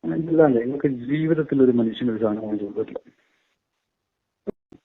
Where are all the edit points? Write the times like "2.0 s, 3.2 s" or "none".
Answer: none